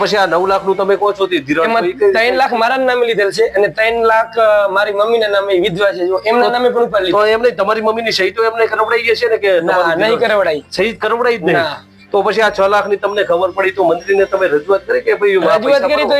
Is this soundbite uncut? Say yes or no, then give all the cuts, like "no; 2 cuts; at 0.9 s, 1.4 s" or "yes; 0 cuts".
yes; 0 cuts